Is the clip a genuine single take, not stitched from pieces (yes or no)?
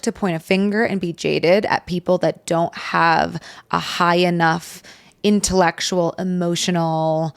yes